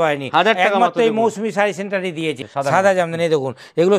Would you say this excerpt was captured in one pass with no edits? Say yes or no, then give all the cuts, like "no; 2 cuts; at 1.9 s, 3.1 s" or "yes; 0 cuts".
no; 1 cut; at 2.4 s